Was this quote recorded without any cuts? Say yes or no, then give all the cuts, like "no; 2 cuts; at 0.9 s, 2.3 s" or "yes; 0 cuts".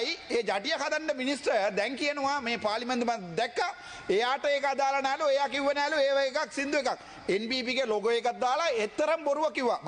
yes; 0 cuts